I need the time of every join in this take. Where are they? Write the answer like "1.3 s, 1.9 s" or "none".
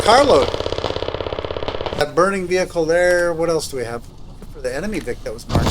2.0 s